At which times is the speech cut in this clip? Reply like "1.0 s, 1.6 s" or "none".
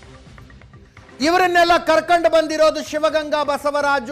1.2 s